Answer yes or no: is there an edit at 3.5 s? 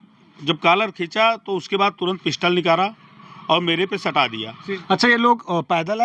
no